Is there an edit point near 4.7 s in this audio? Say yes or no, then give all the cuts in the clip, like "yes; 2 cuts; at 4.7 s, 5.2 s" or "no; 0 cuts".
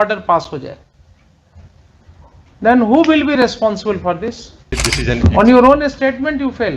yes; 1 cut; at 4.7 s